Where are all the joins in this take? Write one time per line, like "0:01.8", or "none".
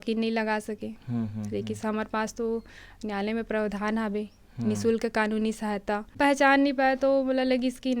0:06.1